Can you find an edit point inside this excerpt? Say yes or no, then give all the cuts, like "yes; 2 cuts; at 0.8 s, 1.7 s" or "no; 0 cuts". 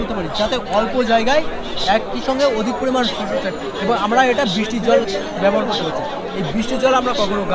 no; 0 cuts